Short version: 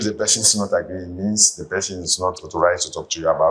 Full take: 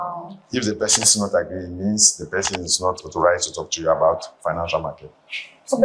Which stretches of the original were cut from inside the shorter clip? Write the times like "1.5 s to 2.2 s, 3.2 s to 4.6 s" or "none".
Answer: none